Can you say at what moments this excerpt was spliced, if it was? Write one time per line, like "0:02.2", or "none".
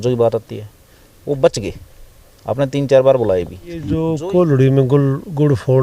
0:03.9